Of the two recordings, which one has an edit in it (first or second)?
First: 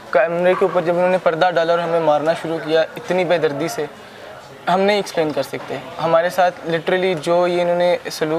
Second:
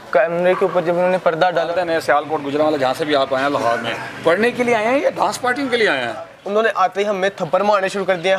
second